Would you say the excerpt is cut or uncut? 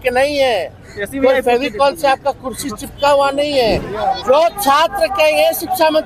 cut